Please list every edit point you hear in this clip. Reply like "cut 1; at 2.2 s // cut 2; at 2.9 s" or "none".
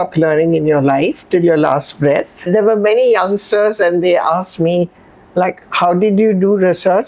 cut 1; at 2.4 s